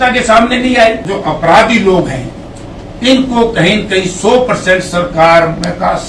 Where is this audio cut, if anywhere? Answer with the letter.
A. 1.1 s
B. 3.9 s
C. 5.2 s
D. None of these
A